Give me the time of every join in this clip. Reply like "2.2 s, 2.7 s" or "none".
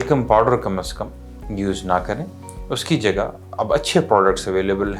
none